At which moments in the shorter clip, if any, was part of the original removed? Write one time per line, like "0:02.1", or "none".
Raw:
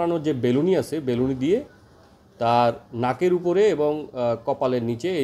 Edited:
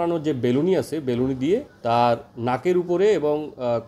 0:01.7